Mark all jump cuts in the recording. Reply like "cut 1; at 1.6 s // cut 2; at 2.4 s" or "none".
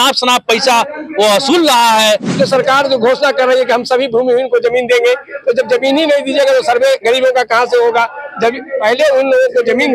cut 1; at 2.3 s